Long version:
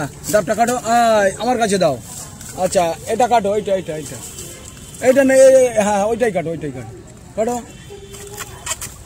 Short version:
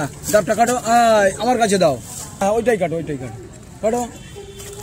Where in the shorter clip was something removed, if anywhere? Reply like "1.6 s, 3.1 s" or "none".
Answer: 2.4 s